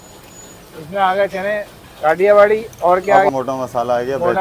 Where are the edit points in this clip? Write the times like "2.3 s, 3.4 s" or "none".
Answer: 3.3 s